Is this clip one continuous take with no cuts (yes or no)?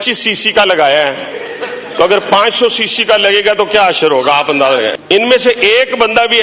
no